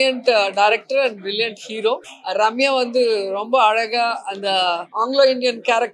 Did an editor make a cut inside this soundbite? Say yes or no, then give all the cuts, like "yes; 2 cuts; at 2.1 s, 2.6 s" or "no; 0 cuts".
yes; 2 cuts; at 2.1 s, 4.9 s